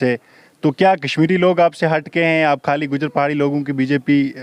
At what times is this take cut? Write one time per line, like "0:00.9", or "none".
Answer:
none